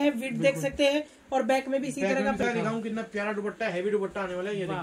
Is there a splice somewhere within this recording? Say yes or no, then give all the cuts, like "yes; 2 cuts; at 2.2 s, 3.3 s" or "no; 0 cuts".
yes; 1 cut; at 2.4 s